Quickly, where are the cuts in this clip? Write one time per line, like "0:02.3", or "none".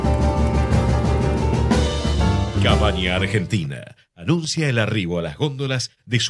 0:02.8